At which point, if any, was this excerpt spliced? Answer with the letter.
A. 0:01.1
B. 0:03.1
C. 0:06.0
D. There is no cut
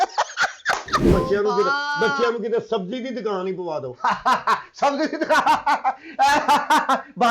A